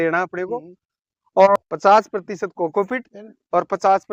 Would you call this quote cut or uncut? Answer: cut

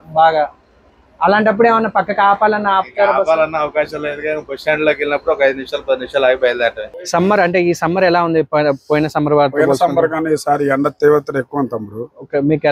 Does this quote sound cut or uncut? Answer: cut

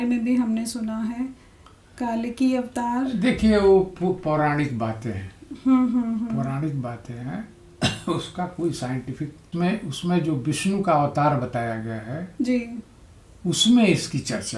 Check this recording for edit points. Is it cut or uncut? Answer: uncut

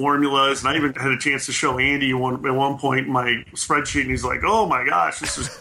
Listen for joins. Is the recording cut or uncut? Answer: cut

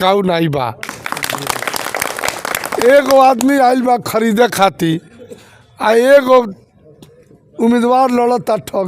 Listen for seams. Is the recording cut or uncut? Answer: uncut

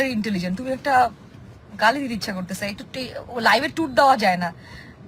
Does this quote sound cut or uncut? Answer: uncut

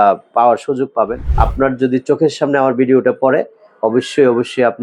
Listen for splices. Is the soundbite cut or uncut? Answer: cut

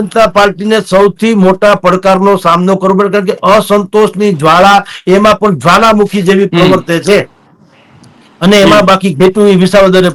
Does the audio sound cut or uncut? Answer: uncut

